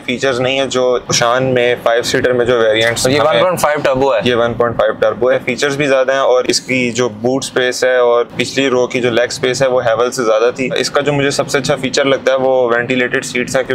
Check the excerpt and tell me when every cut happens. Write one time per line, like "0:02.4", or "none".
0:01.1
0:05.3
0:06.4
0:08.3
0:10.8

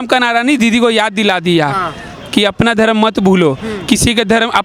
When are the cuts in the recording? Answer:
none

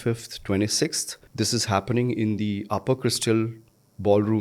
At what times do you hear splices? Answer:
0:01.2

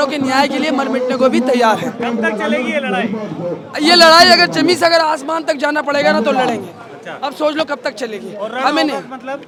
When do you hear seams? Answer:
none

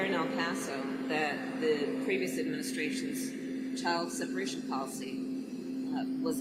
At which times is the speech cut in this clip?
none

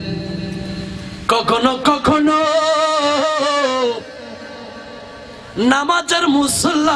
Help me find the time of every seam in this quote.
none

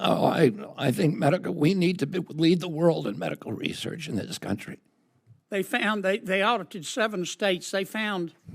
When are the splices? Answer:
0:04.8

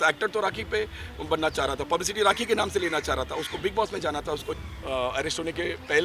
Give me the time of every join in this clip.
0:04.5

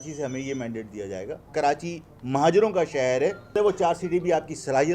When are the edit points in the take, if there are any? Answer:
0:01.4
0:03.5

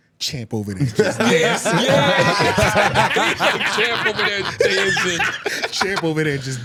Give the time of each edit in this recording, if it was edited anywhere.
none

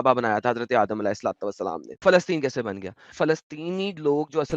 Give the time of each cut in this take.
0:02.0
0:03.1

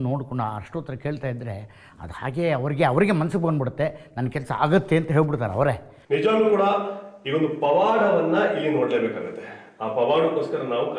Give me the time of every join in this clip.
0:05.9

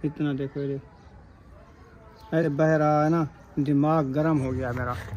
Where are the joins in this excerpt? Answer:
0:02.4

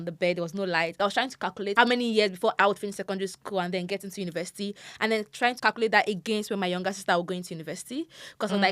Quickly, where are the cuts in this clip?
0:01.3
0:02.6
0:05.6

